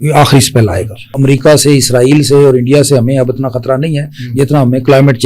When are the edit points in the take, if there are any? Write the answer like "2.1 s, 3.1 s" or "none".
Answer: 1.1 s